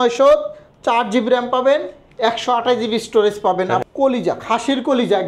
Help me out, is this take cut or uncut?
cut